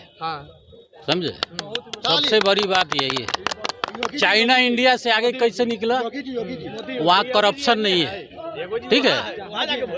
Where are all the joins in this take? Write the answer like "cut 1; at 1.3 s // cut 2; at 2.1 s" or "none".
none